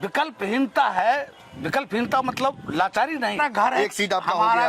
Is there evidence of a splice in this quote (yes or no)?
yes